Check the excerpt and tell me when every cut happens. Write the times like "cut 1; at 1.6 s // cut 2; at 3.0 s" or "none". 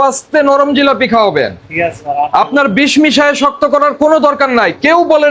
none